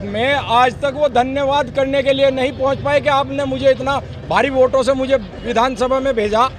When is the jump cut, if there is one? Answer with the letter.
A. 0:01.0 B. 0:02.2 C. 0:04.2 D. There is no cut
D